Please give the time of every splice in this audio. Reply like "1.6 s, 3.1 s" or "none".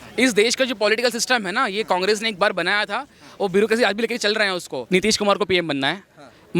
4.7 s